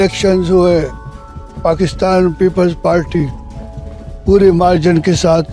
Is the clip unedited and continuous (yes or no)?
yes